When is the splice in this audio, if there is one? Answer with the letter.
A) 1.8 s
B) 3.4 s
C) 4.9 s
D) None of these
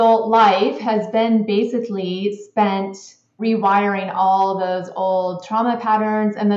B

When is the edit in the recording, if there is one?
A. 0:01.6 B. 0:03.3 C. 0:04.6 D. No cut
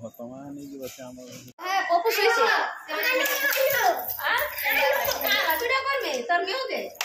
A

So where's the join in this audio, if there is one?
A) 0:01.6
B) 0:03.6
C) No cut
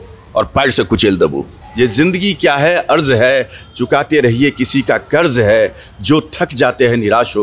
A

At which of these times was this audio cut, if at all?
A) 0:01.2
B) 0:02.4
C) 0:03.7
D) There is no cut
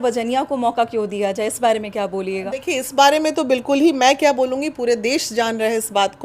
D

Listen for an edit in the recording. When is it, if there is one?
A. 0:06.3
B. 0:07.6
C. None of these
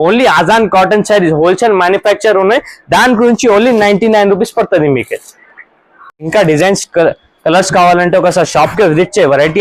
A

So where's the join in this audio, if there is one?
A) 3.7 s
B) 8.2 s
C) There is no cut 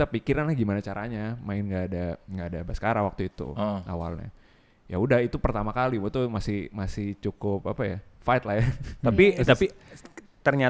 C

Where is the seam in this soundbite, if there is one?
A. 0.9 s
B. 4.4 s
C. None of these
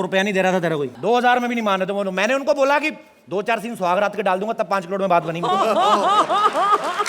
A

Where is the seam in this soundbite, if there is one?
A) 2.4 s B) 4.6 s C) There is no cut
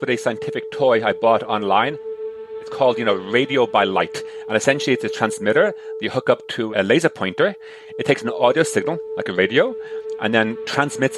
A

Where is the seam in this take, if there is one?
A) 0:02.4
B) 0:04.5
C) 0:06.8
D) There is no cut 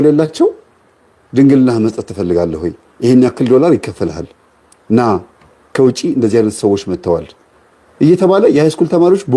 D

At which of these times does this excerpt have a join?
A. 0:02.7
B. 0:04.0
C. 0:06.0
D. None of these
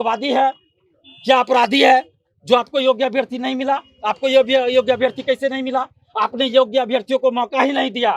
D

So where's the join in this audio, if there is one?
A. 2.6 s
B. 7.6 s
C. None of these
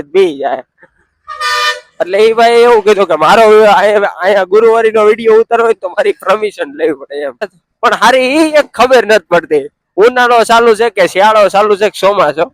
B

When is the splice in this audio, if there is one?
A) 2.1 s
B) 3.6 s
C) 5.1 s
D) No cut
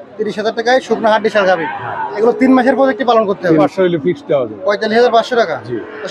B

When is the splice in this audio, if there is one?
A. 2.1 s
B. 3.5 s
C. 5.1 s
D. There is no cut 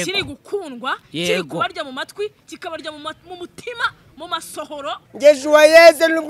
C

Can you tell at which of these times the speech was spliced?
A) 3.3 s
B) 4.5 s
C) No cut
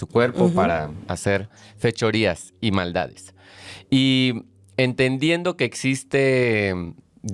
C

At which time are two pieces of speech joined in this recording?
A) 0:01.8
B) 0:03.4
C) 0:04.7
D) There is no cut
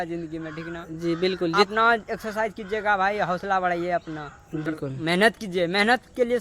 C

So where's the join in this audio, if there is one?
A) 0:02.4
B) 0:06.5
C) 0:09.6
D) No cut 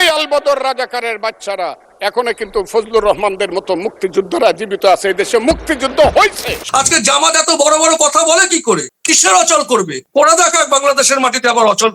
B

